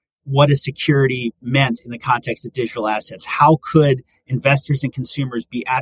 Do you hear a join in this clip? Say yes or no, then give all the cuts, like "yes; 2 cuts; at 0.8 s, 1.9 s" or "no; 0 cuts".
no; 0 cuts